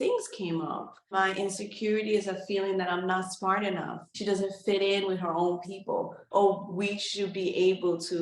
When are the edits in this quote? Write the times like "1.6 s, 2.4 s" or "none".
1.1 s, 4.0 s, 6.2 s